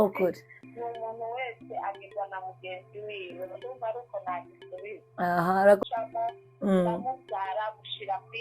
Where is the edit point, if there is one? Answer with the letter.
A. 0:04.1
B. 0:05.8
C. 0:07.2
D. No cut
B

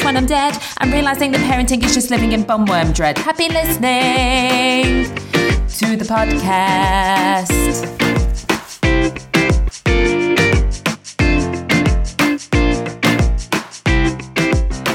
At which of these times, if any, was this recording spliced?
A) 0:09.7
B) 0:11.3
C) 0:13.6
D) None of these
A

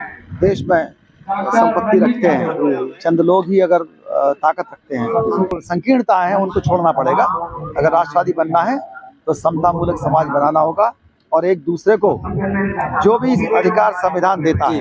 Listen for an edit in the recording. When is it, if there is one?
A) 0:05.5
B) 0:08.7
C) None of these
A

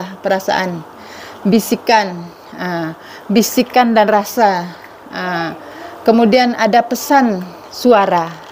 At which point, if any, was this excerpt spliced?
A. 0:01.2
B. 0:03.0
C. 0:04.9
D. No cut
D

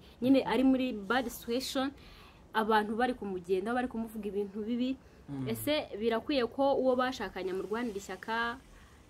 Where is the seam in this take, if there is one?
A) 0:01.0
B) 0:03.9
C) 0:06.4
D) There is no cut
D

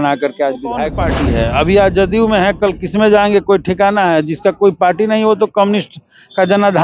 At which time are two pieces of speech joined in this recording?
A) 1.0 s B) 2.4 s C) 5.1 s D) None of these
A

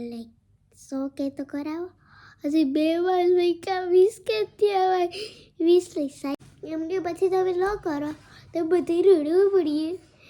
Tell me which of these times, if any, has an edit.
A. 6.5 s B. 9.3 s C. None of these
A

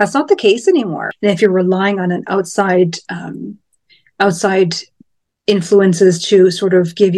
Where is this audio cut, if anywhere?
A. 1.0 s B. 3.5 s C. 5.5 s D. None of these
A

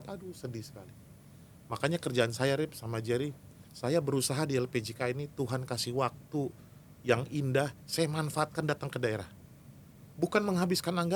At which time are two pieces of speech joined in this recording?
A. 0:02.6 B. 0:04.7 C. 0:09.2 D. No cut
D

